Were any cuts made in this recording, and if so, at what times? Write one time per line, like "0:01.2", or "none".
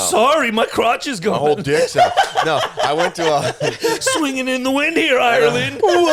none